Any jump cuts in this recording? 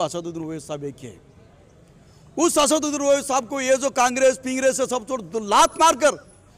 no; 0 cuts

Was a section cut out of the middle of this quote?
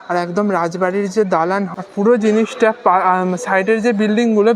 yes; 1 cut; at 1.7 s

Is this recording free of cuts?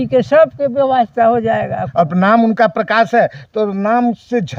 no; 1 cut; at 1.8 s

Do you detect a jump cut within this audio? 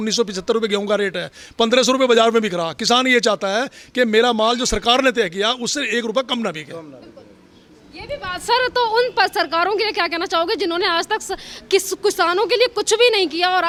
no; 0 cuts

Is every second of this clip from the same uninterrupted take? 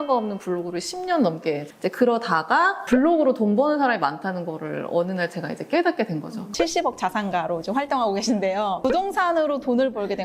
no; 4 cuts; at 1.7 s, 2.8 s, 6.5 s, 8.8 s

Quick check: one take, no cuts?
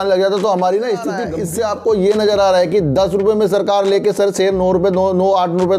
no; 1 cut; at 1.3 s

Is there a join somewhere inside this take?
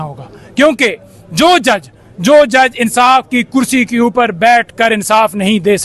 no; 0 cuts

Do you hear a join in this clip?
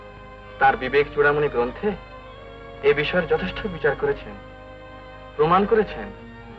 no; 0 cuts

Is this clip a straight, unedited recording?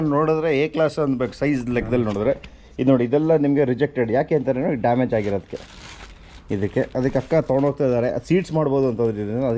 yes; 0 cuts

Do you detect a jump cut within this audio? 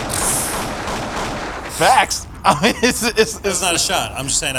no; 0 cuts

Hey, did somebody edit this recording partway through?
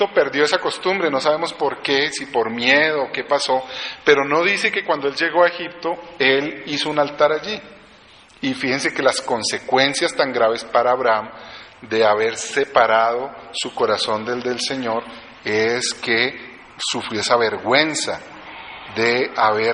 yes; 1 cut; at 3.8 s

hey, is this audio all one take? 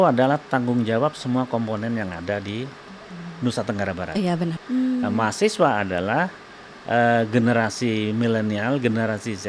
no; 1 cut; at 4.6 s

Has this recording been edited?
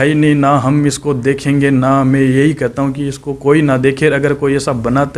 no; 0 cuts

